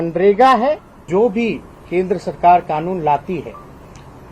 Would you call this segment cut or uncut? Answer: cut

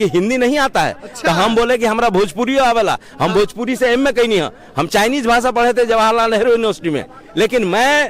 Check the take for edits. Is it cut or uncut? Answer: cut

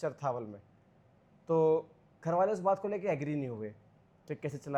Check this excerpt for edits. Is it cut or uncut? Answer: uncut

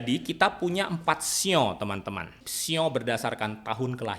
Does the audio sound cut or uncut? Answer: cut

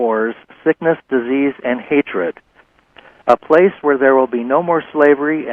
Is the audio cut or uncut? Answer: uncut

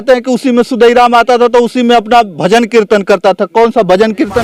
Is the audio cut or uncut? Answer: uncut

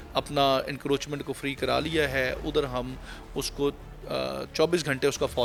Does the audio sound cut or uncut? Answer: uncut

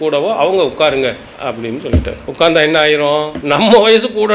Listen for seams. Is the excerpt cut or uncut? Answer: cut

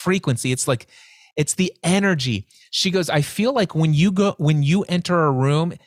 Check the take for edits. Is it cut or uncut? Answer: uncut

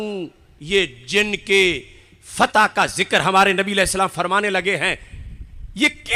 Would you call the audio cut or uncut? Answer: uncut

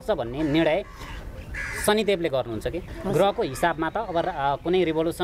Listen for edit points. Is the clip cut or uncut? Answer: cut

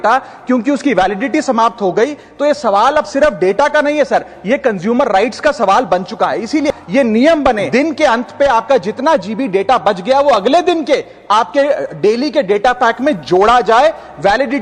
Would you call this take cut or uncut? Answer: cut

